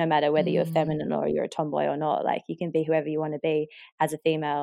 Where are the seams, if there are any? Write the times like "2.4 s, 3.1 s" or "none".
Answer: none

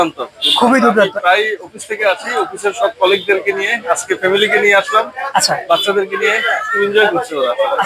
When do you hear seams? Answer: none

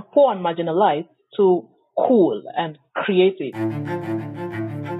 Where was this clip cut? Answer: 3.5 s

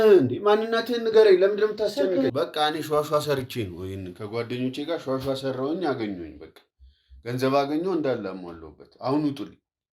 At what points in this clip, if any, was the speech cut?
2.3 s

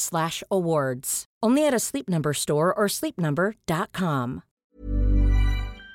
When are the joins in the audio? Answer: 4.5 s

